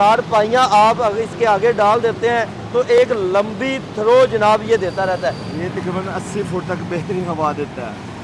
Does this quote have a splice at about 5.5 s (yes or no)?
yes